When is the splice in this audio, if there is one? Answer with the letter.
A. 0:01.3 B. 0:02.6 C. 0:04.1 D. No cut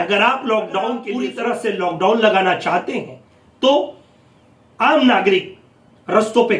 A